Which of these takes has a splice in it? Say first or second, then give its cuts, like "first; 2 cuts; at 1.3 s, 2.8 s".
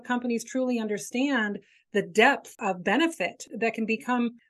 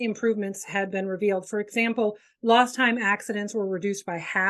first; 2 cuts; at 2.6 s, 3.5 s